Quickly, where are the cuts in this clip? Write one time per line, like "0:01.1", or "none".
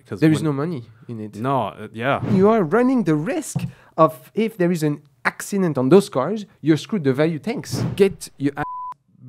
0:02.3
0:07.8